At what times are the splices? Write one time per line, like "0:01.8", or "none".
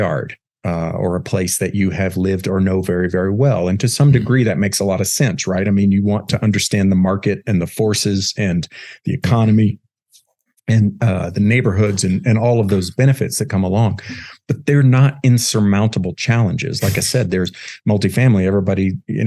none